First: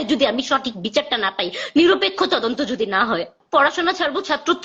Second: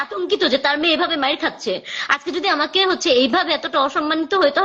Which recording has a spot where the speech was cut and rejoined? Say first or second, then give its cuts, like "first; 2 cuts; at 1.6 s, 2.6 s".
first; 1 cut; at 3.4 s